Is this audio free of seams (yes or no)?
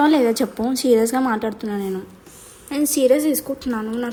yes